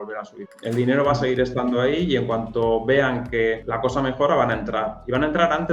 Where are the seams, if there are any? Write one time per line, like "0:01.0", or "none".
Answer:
0:03.7